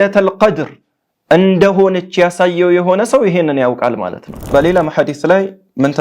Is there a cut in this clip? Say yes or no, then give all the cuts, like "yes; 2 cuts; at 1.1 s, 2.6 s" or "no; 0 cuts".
yes; 1 cut; at 4.3 s